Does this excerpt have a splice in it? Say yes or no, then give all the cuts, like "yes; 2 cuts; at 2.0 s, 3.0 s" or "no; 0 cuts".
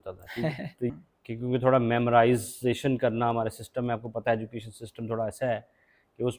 yes; 1 cut; at 0.9 s